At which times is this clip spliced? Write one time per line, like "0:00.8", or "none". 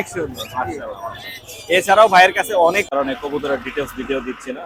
0:02.8